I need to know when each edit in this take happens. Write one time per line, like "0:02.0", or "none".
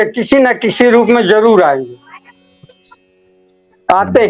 none